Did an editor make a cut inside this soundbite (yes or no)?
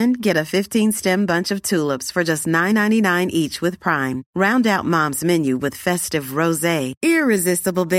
no